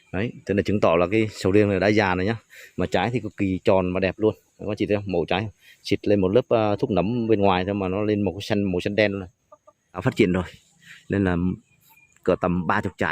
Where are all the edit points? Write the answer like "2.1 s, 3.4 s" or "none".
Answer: 10.0 s